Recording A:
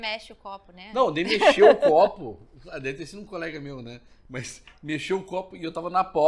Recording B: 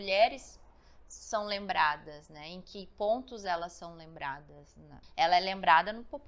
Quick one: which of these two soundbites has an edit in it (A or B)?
B